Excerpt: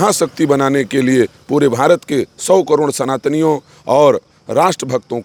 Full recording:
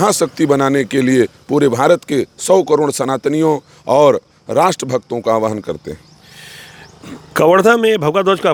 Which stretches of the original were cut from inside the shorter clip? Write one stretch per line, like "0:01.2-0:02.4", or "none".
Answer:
none